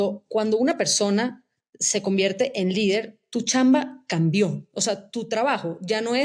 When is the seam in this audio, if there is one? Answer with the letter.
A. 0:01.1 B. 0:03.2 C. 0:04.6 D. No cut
B